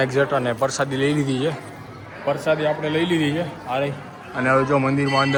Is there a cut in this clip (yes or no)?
no